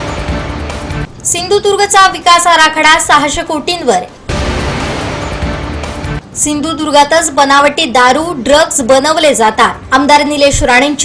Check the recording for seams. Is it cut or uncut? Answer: cut